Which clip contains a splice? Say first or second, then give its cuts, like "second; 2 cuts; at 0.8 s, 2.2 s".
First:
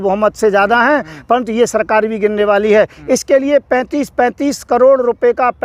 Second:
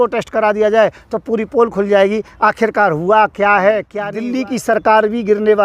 second; 1 cut; at 3.9 s